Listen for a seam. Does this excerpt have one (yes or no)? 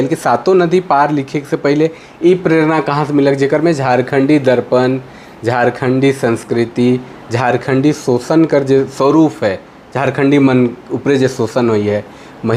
no